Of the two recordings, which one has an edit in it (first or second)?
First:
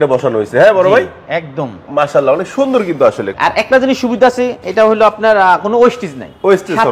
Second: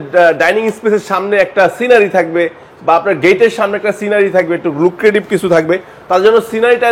first